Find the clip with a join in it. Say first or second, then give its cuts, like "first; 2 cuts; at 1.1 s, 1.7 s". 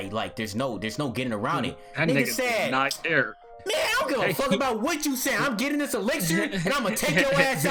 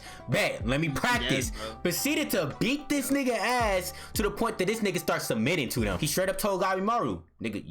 second; 1 cut; at 6.0 s